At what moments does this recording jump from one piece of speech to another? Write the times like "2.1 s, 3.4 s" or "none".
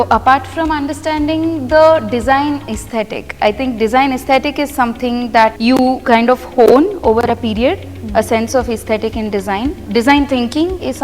5.6 s, 9.8 s